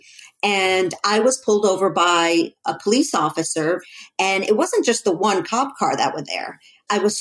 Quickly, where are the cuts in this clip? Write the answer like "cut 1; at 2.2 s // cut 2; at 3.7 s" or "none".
cut 1; at 3.8 s